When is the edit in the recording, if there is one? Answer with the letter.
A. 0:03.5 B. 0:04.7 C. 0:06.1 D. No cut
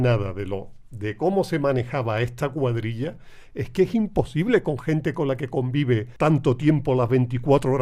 C